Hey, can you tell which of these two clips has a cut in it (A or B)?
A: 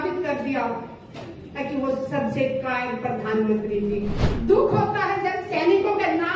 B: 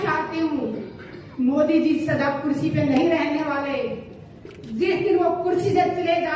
A